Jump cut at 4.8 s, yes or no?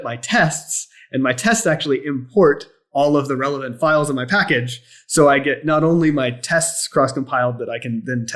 no